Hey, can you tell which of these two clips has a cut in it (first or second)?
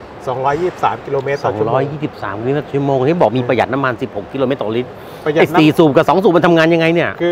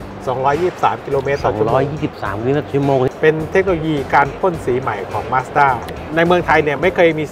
second